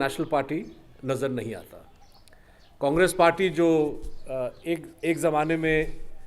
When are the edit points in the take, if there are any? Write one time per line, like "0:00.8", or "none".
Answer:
none